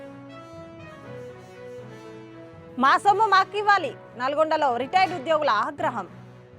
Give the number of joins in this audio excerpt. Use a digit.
1